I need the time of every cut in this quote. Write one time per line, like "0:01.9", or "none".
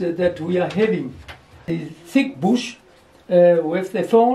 0:01.8